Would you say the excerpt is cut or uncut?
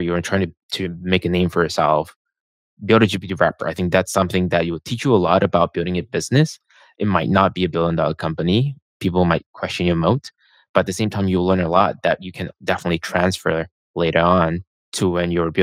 uncut